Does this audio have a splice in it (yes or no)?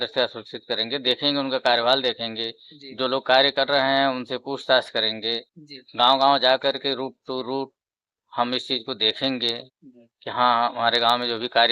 no